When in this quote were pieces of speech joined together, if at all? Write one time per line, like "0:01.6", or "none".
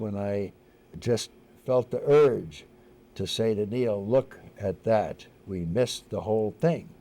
0:00.9